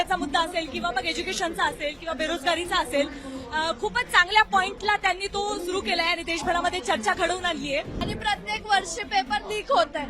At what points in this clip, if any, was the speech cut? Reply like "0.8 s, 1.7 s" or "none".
8.1 s